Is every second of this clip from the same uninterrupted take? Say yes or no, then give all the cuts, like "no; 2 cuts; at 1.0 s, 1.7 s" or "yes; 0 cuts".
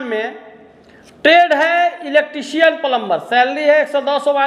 yes; 0 cuts